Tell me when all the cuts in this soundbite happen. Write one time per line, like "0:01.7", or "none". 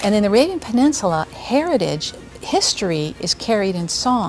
none